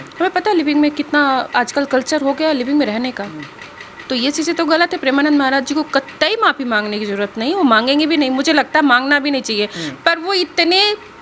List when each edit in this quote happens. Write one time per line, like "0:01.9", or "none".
none